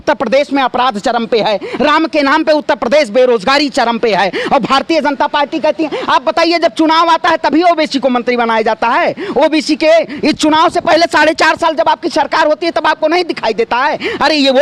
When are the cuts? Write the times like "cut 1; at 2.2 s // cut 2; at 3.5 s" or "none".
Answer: none